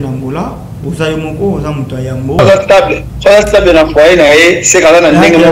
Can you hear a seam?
yes; 1 cut; at 2.4 s

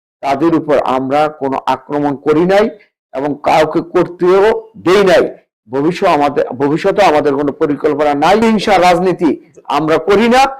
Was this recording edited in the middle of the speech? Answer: yes; 1 cut; at 8.4 s

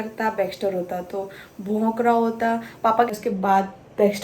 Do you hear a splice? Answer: yes; 1 cut; at 3.1 s

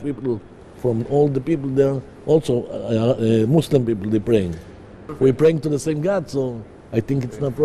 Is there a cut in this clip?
no; 0 cuts

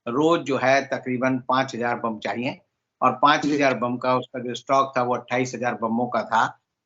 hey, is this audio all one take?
yes; 0 cuts

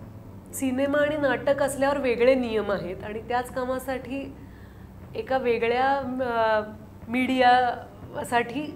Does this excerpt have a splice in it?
no; 0 cuts

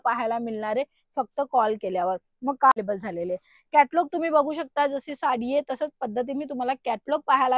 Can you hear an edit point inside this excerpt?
yes; 1 cut; at 2.7 s

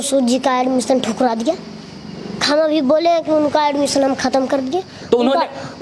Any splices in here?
no; 0 cuts

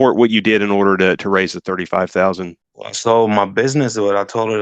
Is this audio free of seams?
no; 1 cut; at 3.0 s

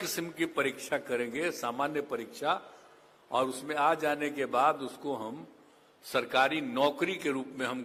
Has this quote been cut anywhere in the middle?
no; 0 cuts

